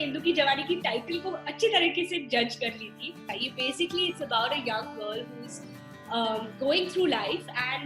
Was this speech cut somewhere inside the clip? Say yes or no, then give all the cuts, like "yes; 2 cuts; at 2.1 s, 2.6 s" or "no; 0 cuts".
yes; 1 cut; at 3.3 s